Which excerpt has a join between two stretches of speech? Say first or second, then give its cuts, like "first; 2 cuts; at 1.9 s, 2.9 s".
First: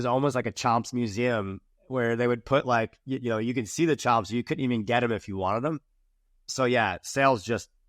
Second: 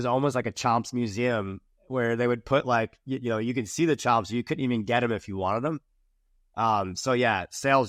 first; 1 cut; at 6.5 s